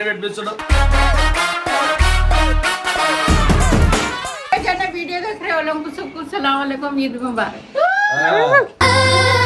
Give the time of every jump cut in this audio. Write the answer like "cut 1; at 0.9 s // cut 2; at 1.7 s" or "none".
cut 1; at 4.4 s